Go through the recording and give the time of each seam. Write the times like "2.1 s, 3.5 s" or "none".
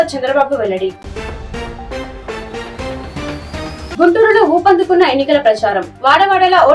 none